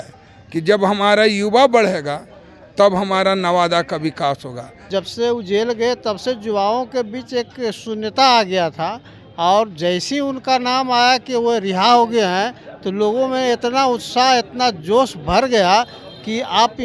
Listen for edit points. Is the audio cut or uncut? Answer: cut